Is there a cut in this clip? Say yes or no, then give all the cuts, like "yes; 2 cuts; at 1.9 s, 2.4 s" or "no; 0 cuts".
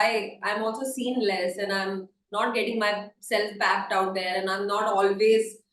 no; 0 cuts